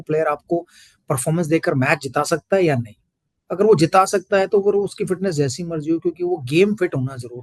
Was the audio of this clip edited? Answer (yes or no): no